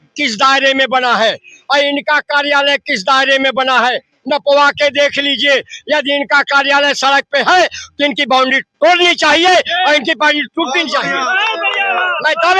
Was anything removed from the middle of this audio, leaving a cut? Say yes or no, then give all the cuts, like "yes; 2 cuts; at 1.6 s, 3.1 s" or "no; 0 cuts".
no; 0 cuts